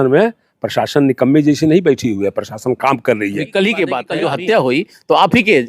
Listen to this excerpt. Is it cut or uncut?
cut